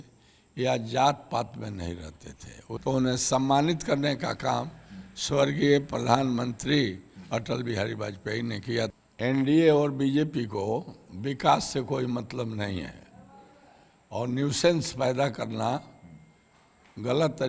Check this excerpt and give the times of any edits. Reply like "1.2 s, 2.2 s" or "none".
2.8 s, 8.9 s